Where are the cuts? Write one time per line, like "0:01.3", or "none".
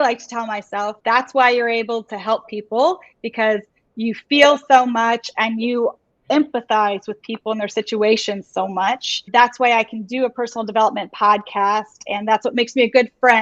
0:00.9
0:09.2